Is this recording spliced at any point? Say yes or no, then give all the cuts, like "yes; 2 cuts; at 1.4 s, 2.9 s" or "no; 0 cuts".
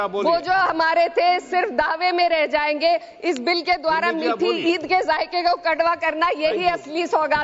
no; 0 cuts